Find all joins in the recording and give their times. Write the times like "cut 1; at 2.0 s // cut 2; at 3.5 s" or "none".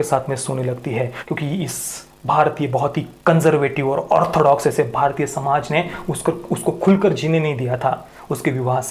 cut 1; at 1.2 s